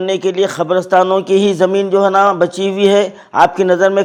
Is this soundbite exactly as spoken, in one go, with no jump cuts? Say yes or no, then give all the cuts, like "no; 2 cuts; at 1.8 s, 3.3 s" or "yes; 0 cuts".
yes; 0 cuts